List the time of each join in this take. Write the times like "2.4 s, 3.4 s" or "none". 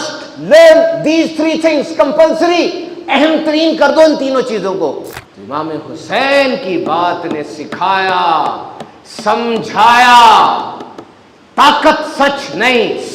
5.5 s